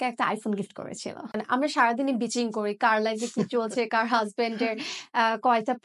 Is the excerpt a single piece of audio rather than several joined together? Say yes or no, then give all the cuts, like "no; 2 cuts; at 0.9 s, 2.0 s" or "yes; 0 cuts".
no; 1 cut; at 1.2 s